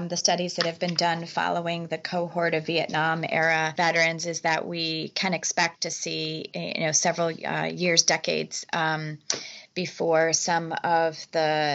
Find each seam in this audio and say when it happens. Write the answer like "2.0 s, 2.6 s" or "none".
3.7 s